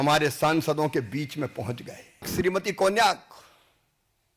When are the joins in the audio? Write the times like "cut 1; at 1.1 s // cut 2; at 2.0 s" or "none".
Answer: cut 1; at 2.3 s